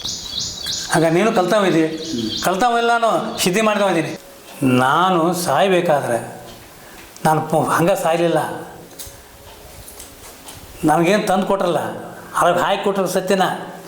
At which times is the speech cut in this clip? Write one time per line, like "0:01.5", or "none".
0:04.1

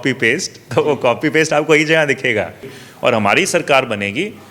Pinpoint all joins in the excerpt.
0:02.7

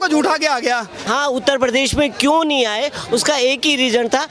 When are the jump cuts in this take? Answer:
0:01.0

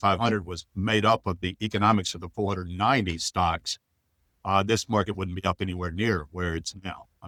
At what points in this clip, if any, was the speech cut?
none

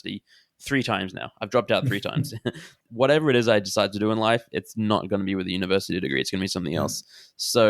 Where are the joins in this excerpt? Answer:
0:02.8

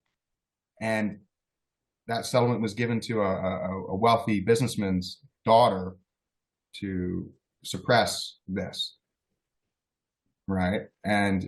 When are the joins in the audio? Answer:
none

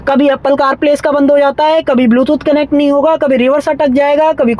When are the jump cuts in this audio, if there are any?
none

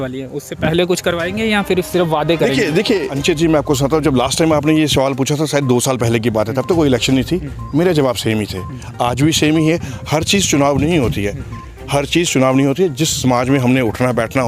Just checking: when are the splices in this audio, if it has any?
0:03.1

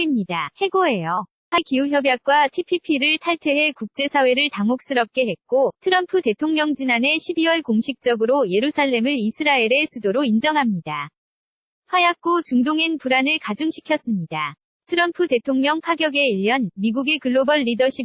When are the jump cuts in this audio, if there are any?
0:01.6

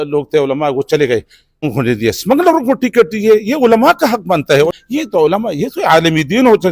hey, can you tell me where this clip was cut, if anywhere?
0:01.7
0:04.7

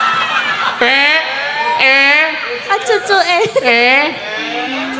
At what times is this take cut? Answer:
none

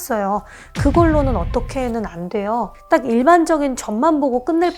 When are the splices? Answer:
0:02.8

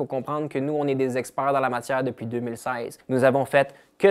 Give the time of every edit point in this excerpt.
0:02.9

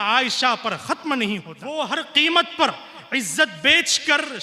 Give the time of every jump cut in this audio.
0:01.6

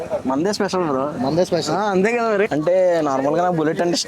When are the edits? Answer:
0:02.5

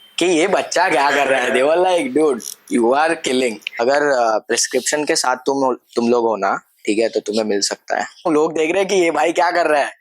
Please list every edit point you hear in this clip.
0:03.8
0:08.3

